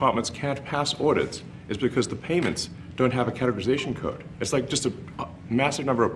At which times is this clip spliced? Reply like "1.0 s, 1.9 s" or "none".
none